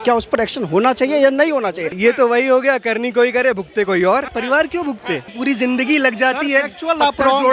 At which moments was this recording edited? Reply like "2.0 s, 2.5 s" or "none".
1.9 s, 4.3 s, 5.3 s

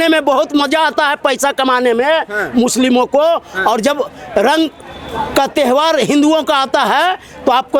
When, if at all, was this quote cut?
none

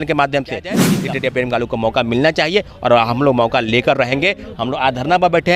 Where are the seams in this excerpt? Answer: 0.9 s

